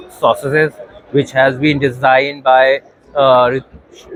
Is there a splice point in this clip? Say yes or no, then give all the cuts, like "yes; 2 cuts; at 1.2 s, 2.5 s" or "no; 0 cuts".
no; 0 cuts